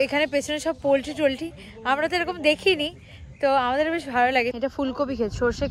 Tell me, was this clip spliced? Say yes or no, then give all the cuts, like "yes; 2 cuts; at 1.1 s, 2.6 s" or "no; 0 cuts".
yes; 1 cut; at 4.5 s